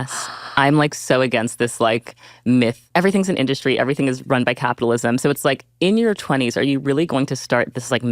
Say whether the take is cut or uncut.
cut